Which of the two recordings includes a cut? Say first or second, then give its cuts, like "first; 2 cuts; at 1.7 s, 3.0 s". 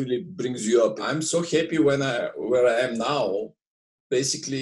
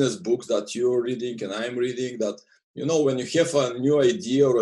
first; 1 cut; at 1.0 s